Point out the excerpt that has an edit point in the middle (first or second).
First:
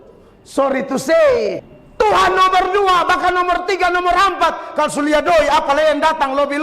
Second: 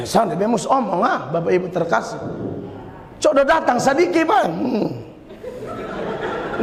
first